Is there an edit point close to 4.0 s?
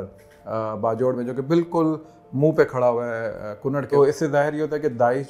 yes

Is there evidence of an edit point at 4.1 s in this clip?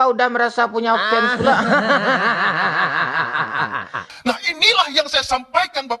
yes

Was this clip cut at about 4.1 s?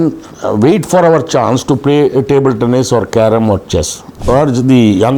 yes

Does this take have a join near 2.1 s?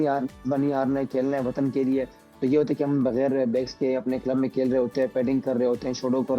no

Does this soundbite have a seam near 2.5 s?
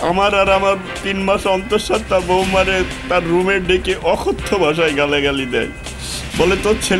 no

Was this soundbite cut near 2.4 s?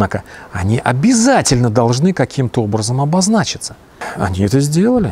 no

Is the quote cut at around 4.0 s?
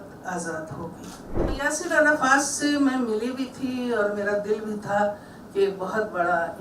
no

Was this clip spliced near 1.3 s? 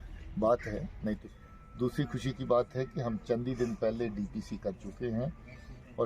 yes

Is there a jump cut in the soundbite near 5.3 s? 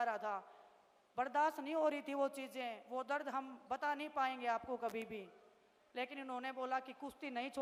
no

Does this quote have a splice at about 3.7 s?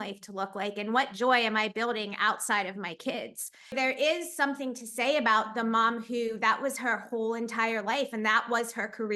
yes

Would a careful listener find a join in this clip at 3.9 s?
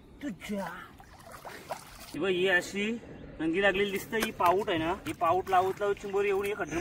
no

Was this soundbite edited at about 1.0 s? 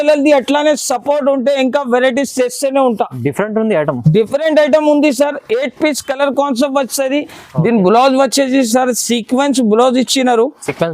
no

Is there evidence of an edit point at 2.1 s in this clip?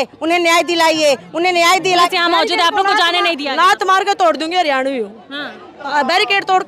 yes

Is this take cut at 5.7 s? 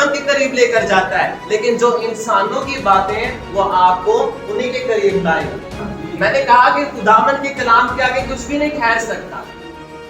yes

